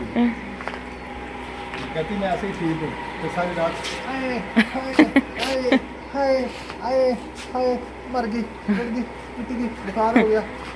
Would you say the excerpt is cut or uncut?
uncut